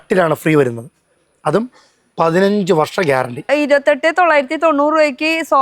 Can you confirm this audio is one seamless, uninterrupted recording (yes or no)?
no